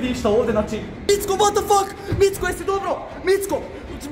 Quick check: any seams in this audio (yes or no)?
yes